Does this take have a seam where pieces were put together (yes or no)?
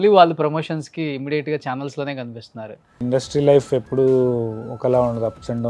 yes